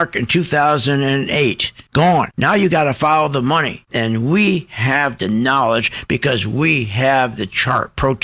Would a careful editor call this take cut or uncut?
uncut